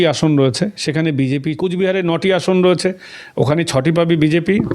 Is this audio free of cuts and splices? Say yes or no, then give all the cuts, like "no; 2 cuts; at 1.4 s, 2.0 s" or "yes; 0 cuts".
no; 1 cut; at 1.6 s